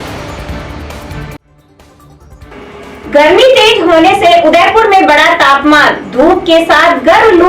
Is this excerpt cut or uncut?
cut